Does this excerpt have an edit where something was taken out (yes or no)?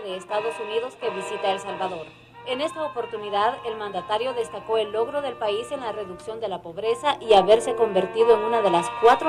no